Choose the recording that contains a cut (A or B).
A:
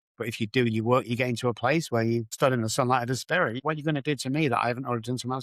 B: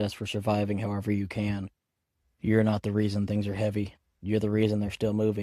A